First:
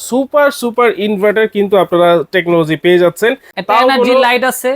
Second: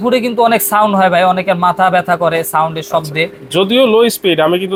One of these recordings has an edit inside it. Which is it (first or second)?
first